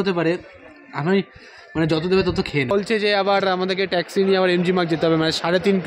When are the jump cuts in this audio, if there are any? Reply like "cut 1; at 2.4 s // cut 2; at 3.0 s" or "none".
cut 1; at 2.7 s